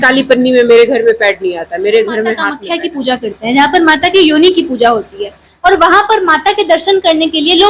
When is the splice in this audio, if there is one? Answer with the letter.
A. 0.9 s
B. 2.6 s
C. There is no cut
B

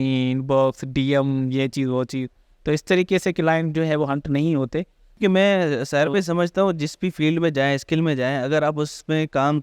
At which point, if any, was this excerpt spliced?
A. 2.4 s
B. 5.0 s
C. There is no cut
B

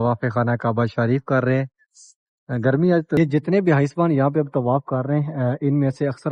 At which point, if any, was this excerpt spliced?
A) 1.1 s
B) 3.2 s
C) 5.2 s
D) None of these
B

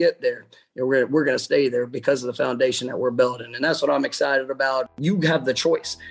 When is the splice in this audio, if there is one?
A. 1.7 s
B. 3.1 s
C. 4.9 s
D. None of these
C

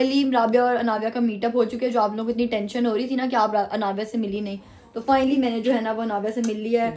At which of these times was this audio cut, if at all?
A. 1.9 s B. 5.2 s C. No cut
C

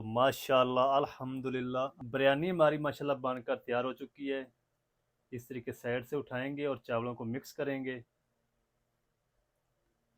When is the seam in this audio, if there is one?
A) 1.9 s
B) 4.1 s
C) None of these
A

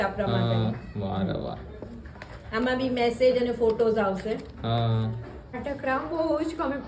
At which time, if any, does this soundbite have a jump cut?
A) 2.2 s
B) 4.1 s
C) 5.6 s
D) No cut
C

